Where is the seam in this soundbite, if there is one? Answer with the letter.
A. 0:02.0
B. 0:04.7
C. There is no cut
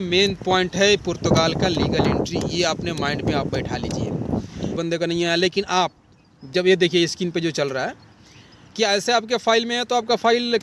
B